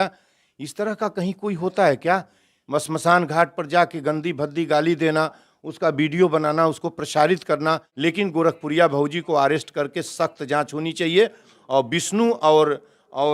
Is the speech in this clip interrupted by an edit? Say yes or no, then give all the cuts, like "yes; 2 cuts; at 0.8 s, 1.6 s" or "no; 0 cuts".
yes; 1 cut; at 7.9 s